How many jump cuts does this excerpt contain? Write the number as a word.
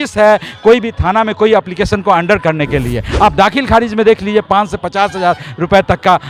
zero